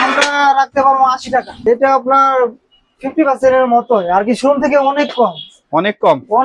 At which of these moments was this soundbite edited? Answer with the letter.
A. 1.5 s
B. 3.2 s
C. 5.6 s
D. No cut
A